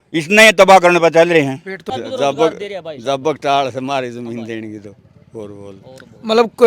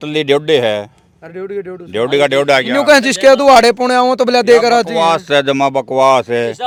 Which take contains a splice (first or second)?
first